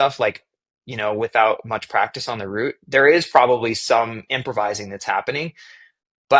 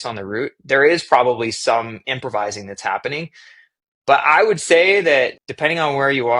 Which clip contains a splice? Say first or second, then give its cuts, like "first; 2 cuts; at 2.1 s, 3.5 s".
second; 1 cut; at 5.4 s